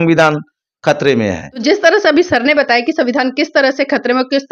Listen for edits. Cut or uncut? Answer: uncut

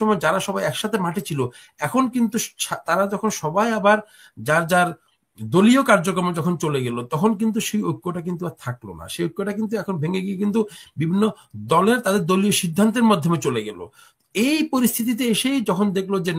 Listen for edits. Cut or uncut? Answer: uncut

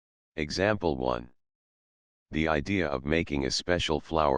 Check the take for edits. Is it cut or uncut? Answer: uncut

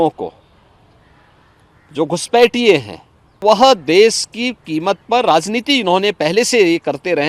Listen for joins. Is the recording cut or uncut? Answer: cut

